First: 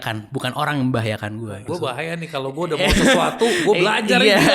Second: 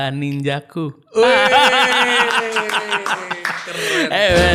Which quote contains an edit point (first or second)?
first